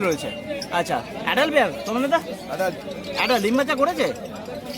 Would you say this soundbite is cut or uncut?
uncut